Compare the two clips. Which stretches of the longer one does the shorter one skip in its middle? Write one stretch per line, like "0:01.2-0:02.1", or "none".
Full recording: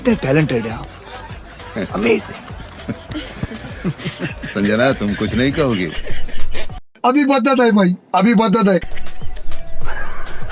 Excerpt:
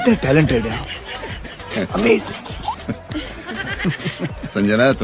none